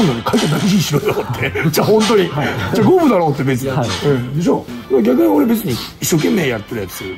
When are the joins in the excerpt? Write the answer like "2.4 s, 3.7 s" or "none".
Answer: none